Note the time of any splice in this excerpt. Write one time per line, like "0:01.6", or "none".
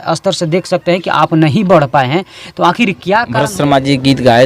0:03.4